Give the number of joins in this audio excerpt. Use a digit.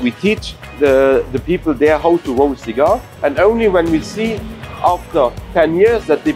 2